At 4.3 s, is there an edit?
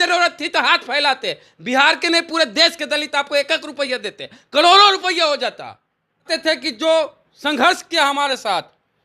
no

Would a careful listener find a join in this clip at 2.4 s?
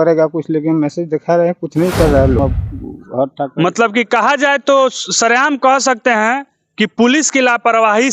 yes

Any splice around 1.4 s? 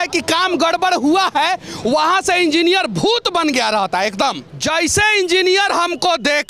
no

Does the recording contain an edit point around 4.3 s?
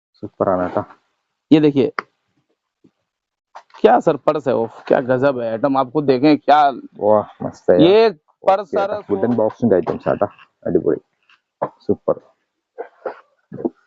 no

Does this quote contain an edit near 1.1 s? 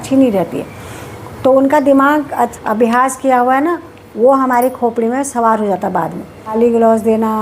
no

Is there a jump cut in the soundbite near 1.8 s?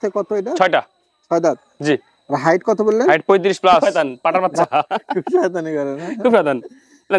no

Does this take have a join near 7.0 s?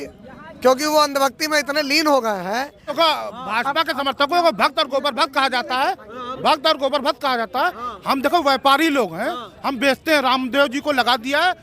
no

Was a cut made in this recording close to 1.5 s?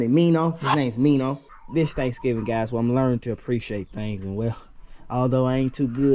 yes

